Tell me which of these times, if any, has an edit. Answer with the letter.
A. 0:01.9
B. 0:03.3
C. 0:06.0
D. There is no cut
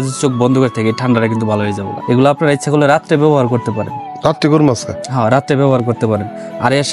A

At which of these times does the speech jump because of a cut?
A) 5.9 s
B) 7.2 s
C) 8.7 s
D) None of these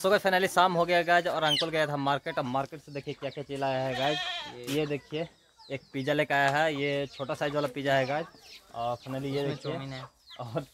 D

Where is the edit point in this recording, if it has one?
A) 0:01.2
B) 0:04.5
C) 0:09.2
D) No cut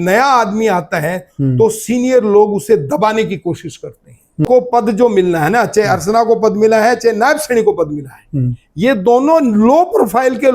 B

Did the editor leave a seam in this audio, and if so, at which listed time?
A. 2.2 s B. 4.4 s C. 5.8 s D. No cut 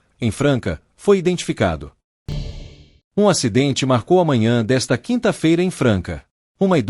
A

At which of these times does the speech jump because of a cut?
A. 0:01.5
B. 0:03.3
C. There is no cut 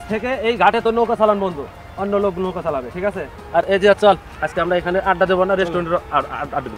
C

